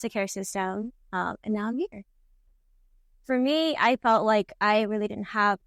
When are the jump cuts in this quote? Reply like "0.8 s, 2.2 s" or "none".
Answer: 2.5 s